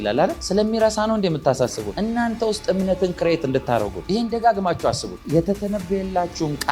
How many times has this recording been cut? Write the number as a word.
one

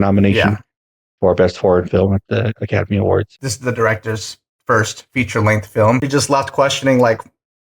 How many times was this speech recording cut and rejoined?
two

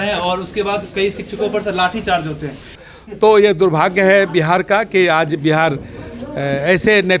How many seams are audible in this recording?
one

